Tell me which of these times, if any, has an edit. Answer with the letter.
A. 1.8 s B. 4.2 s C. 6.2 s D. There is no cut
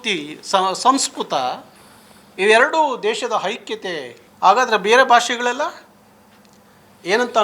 B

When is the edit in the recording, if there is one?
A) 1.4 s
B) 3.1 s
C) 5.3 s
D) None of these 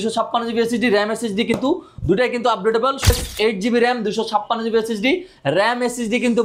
B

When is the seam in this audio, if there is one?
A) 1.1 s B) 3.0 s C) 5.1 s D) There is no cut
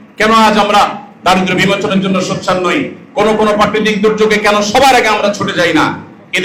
D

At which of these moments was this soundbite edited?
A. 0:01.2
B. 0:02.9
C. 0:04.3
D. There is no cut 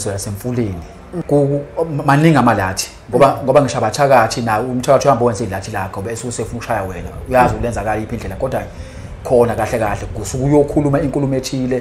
A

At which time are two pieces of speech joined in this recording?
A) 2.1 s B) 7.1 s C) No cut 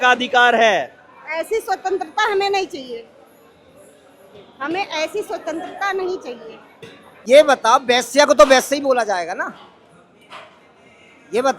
B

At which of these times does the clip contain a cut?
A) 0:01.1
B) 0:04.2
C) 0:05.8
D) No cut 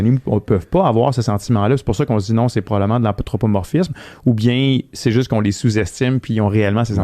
D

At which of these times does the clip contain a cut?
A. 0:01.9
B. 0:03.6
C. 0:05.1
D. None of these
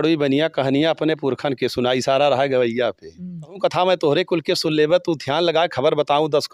B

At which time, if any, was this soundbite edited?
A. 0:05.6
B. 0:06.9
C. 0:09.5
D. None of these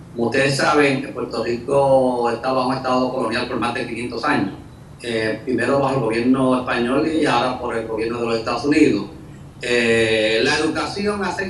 A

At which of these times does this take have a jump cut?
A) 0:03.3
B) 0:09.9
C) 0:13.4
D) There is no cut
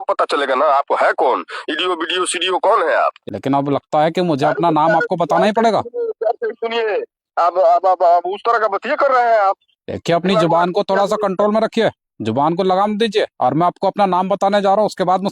A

